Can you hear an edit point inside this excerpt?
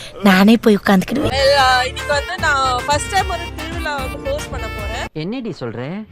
yes; 1 cut; at 1.3 s

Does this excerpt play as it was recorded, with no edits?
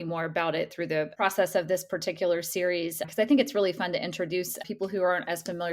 yes; 0 cuts

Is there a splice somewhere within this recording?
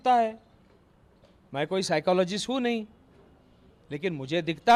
no; 0 cuts

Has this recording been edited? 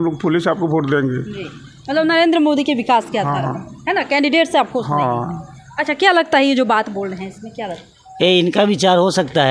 no; 0 cuts

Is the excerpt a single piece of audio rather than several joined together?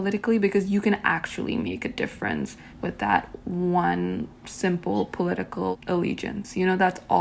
no; 2 cuts; at 2.6 s, 5.7 s

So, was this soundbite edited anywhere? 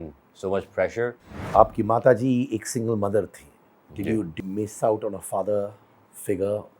yes; 2 cuts; at 1.4 s, 4.3 s

